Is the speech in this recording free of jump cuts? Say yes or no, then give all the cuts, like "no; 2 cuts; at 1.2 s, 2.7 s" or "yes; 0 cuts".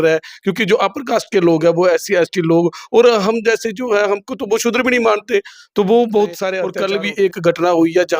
no; 1 cut; at 6.7 s